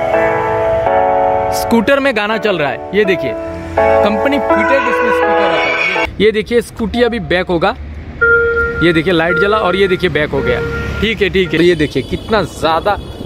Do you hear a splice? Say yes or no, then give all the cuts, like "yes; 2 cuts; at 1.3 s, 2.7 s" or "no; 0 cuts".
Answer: yes; 2 cuts; at 6.1 s, 11.6 s